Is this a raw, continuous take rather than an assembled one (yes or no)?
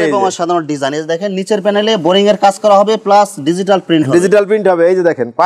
yes